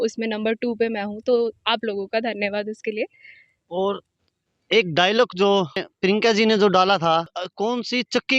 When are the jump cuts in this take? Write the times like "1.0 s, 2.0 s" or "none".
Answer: 5.9 s, 7.4 s